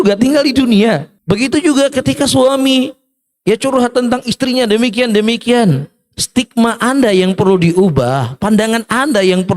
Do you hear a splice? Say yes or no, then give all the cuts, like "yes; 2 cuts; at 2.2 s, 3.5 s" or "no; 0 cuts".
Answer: yes; 1 cut; at 1.1 s